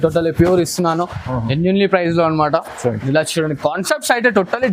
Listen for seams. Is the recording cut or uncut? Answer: uncut